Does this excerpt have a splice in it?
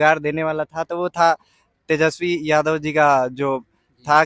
no; 0 cuts

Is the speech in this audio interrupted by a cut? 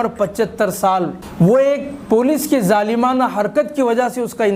yes; 1 cut; at 1.2 s

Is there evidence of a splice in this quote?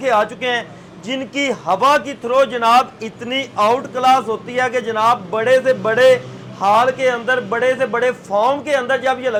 no; 0 cuts

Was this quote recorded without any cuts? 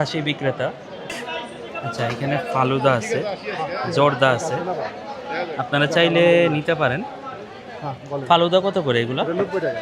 no; 1 cut; at 1.1 s

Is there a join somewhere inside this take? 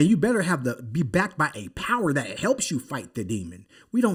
no; 0 cuts

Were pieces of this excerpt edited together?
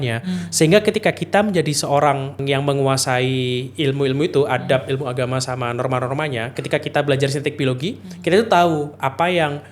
yes; 1 cut; at 2.4 s

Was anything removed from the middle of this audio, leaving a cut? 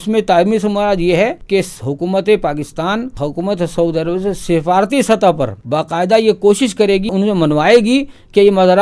yes; 4 cuts; at 1.4 s, 3.1 s, 5.6 s, 7.1 s

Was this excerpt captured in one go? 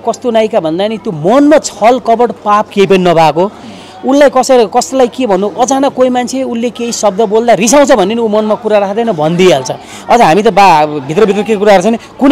yes; 0 cuts

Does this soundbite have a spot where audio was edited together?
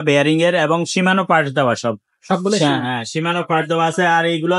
no; 0 cuts

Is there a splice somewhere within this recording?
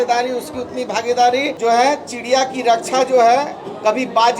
yes; 1 cut; at 1.5 s

